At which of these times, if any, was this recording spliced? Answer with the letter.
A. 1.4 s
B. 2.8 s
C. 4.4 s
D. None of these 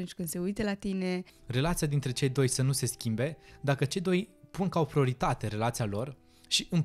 A